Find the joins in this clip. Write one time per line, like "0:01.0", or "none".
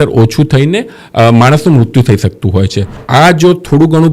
0:03.0